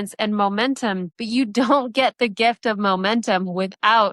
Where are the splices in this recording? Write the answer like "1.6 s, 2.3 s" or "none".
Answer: 1.1 s